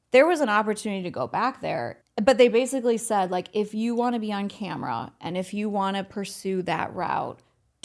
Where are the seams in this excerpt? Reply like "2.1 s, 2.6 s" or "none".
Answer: 2.0 s